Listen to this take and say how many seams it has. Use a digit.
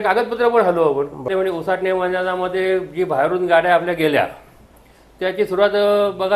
1